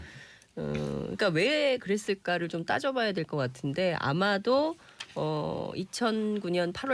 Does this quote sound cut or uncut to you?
cut